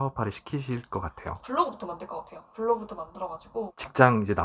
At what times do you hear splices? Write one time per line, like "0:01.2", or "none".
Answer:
0:01.5
0:03.7